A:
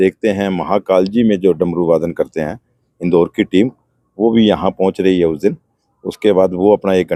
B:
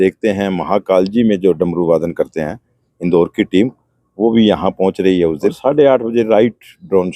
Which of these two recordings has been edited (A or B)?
B